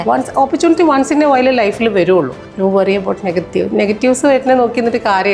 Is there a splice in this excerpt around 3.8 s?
no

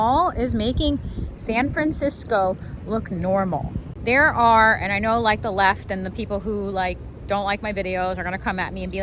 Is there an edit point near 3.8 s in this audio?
yes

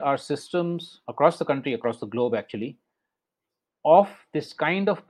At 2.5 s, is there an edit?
no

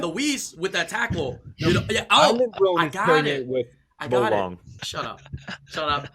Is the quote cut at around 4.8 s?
yes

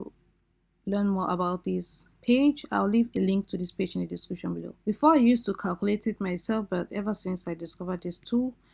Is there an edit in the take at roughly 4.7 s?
yes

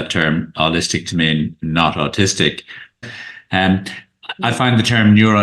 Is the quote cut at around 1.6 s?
no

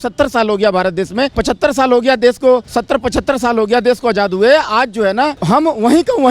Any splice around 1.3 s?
yes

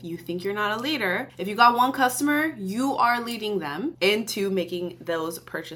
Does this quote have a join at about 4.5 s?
no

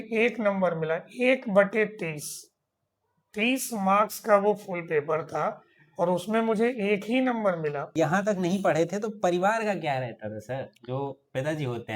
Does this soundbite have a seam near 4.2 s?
no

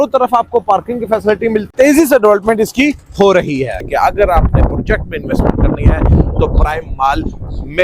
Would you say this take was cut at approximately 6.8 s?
no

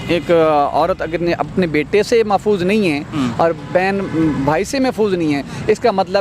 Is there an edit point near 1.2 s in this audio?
no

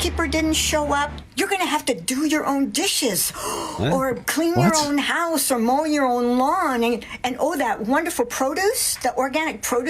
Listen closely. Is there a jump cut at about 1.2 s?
yes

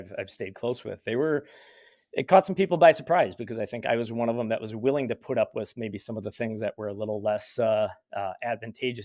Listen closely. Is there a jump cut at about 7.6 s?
no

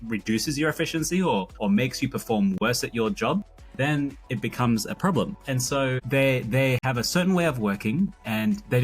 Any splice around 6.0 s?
yes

